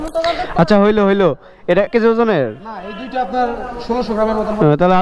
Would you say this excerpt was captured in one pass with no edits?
no; 1 cut; at 1.9 s

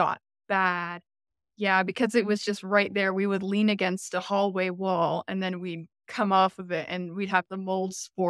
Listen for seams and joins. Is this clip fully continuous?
yes; 0 cuts

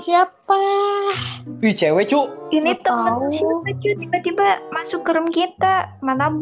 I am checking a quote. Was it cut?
no; 0 cuts

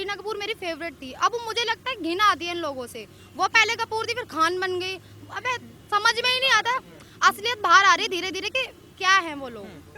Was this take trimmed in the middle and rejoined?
no; 0 cuts

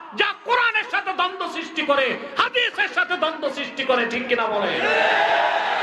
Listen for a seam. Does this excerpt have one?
no; 0 cuts

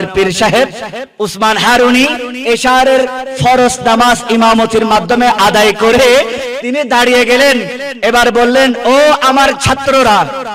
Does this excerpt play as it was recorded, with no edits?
yes; 0 cuts

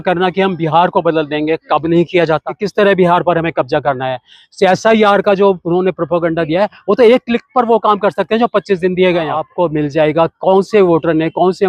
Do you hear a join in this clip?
yes; 2 cuts; at 2.6 s, 9.4 s

